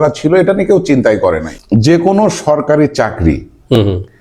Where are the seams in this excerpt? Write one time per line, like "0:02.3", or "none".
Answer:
0:01.5